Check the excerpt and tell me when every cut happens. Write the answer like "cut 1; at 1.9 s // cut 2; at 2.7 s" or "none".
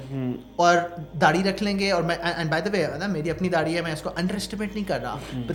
none